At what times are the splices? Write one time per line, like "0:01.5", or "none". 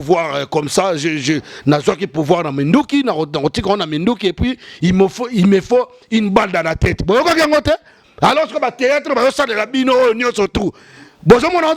none